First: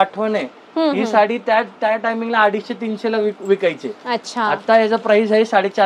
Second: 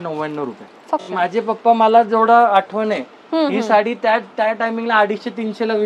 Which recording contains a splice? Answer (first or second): second